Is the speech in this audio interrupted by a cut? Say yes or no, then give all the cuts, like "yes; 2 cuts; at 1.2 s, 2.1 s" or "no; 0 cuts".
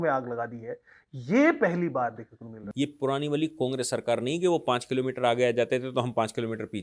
yes; 1 cut; at 2.6 s